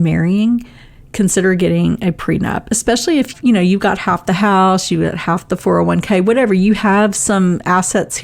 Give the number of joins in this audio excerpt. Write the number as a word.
one